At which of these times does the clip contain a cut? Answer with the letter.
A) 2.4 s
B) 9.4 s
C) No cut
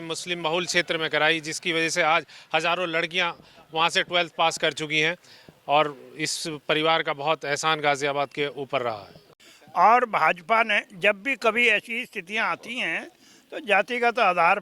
B